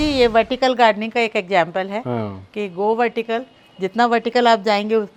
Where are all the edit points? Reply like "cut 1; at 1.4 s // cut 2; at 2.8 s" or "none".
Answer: none